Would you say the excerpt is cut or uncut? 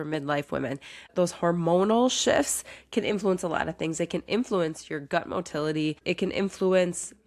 cut